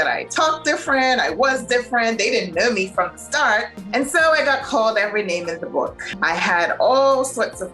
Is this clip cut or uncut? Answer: cut